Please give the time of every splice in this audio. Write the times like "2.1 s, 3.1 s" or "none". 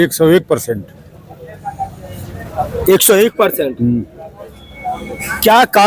none